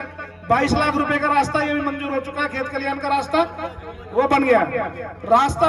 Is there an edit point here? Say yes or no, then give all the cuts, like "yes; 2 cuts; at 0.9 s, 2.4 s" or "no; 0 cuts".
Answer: no; 0 cuts